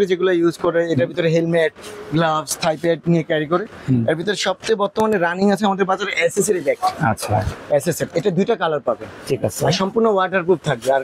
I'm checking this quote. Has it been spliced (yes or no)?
no